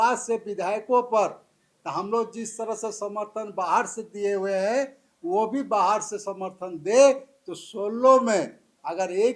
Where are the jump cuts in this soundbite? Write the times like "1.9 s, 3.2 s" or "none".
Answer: none